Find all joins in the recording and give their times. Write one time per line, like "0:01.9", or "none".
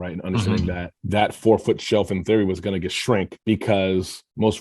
0:00.9